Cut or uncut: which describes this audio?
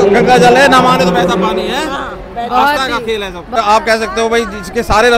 cut